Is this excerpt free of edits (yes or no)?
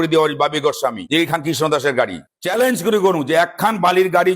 no